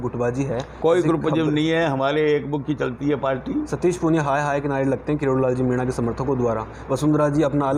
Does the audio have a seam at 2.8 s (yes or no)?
no